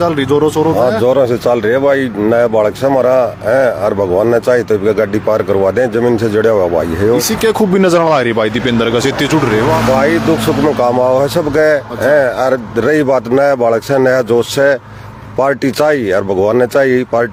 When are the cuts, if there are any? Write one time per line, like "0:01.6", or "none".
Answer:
none